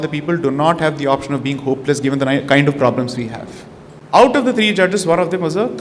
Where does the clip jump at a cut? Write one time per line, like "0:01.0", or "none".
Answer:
0:04.2

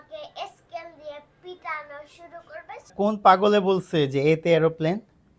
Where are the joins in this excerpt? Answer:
0:02.9

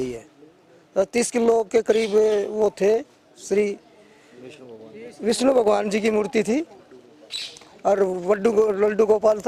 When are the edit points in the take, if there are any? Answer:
none

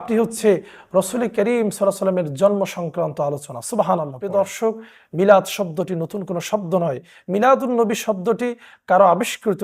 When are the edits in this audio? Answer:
0:04.2

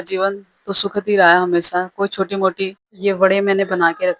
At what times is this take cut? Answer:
0:02.8

